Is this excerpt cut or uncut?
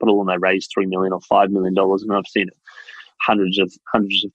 uncut